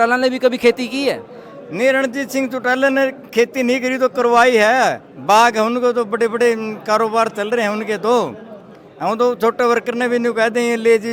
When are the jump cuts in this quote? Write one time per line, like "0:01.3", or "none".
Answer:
none